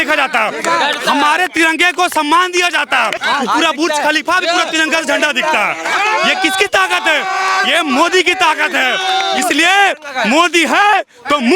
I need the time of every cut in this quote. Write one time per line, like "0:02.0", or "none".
0:03.1